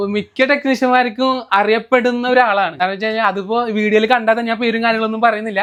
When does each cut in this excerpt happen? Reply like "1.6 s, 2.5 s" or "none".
none